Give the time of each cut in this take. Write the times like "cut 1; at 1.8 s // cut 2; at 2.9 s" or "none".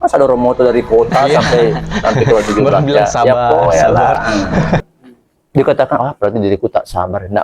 cut 1; at 4.8 s